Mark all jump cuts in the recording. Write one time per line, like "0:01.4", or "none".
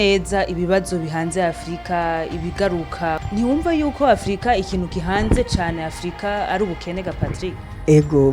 none